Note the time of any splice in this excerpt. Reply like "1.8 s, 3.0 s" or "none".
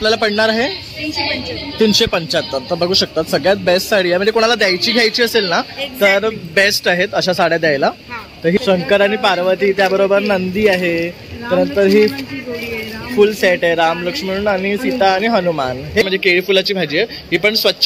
8.6 s, 16.0 s